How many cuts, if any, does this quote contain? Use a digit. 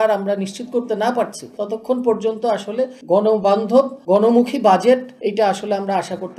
4